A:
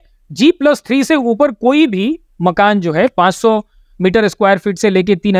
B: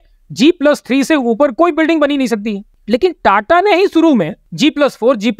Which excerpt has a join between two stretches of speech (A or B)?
B